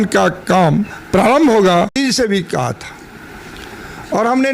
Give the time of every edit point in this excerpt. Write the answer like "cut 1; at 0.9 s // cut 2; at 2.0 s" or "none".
cut 1; at 1.9 s